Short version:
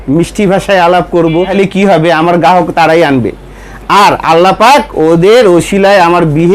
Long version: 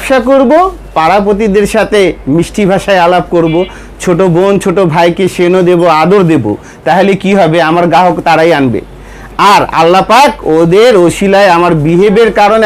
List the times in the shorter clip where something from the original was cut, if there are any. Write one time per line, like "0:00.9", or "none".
0:01.5